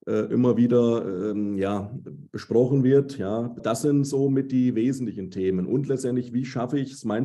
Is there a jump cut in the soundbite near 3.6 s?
yes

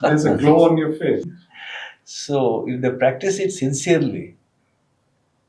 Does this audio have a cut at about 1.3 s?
yes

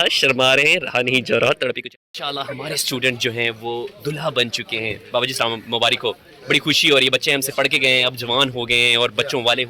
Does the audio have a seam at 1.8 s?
yes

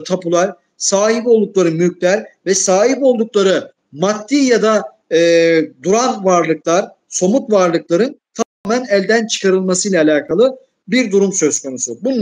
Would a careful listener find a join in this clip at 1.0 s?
no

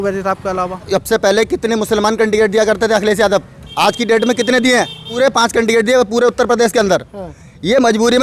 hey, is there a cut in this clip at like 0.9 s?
yes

